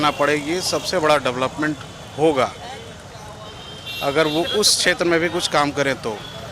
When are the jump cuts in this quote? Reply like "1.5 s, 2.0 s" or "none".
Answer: none